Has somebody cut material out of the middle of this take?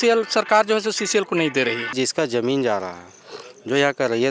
yes; 1 cut; at 1.9 s

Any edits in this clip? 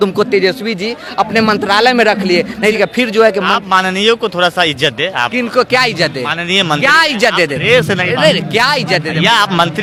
no; 0 cuts

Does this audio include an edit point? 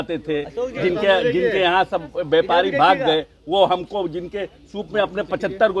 no; 0 cuts

